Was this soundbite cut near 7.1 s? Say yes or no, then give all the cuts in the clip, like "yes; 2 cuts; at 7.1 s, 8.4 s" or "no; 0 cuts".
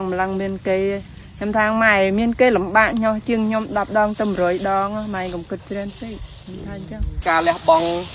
yes; 1 cut; at 7.1 s